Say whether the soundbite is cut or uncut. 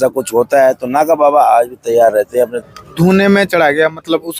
cut